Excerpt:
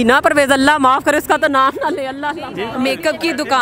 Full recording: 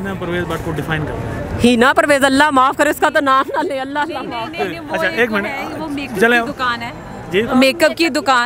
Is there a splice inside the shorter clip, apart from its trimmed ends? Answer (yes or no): yes